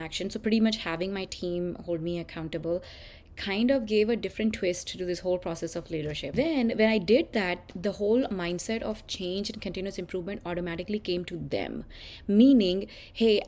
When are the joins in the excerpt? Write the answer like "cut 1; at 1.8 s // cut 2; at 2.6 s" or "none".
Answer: none